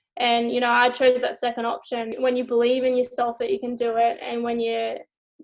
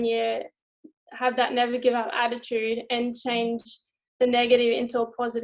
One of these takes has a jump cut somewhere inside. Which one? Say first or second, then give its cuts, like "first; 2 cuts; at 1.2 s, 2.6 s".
first; 1 cut; at 2.1 s